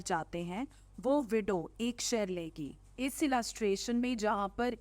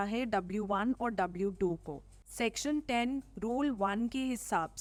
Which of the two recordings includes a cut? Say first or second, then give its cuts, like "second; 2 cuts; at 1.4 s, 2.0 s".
first; 1 cut; at 2.8 s